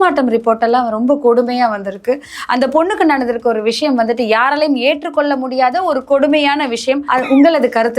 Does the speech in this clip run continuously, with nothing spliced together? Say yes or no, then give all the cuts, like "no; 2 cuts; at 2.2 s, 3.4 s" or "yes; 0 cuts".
no; 1 cut; at 7.0 s